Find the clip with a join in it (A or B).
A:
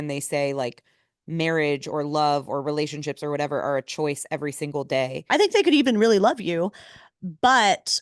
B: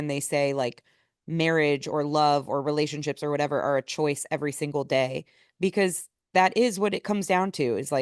A